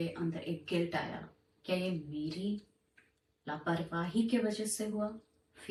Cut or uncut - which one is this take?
uncut